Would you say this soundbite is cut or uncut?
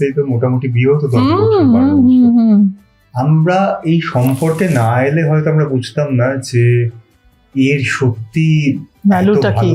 uncut